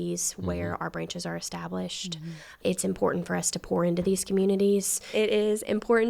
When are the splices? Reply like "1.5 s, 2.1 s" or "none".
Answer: 5.0 s